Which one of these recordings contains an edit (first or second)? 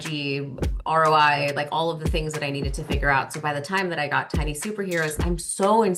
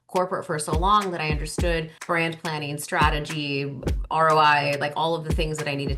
second